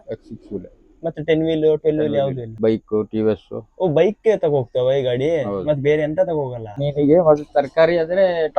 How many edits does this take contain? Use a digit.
2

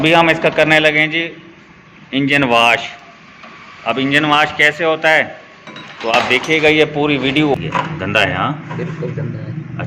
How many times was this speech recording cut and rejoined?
1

